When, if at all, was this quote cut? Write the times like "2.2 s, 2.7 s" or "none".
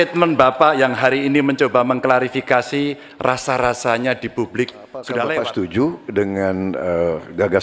5.4 s